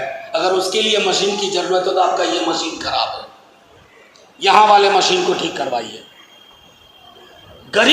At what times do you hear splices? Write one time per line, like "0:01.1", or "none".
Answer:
none